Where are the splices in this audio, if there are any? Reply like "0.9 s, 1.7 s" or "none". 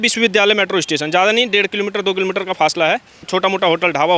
3.3 s